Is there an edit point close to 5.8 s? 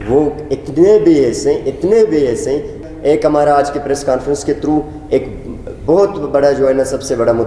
no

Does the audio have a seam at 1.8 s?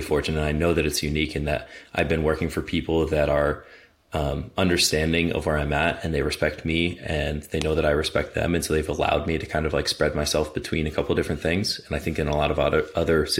no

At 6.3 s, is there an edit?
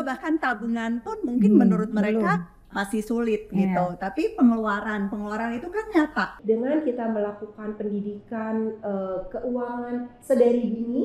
yes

